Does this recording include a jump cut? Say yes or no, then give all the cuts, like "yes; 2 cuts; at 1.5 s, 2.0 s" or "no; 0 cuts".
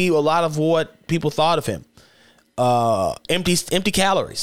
no; 0 cuts